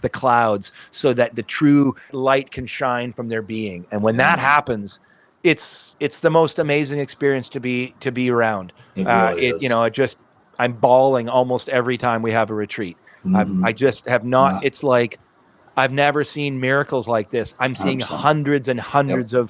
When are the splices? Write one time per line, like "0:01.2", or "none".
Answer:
0:02.1